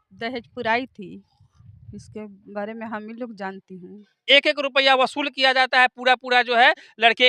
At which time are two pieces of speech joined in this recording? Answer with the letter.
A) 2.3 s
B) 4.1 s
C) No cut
B